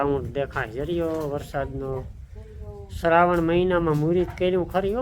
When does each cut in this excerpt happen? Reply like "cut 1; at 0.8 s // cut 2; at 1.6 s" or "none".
none